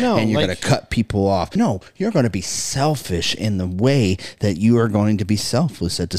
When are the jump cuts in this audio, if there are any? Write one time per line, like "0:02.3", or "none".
0:01.5